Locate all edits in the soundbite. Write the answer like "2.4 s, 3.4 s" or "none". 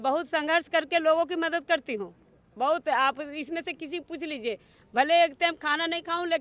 none